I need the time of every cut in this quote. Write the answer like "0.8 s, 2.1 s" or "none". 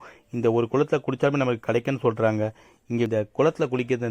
3.1 s